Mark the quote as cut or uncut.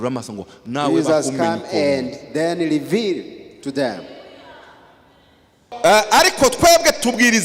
cut